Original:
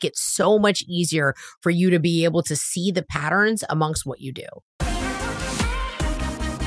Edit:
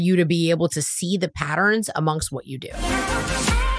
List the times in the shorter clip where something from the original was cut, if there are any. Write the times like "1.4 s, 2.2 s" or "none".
2.8 s